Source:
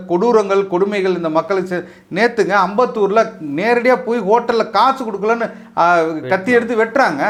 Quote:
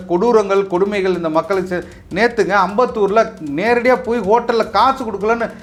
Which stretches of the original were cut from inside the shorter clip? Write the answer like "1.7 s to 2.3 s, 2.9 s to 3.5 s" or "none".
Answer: none